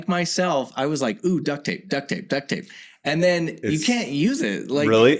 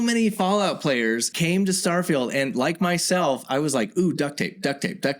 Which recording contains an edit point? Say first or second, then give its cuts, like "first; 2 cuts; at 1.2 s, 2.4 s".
second; 1 cut; at 1.3 s